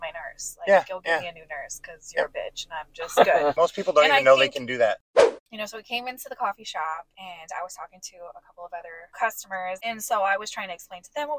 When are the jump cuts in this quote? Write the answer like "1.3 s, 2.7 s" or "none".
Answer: 3.5 s, 5.2 s, 7.1 s, 9.0 s, 9.8 s